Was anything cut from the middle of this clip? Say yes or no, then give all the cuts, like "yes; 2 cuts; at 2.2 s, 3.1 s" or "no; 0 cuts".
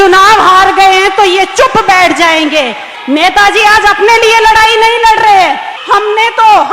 yes; 2 cuts; at 2.9 s, 5.7 s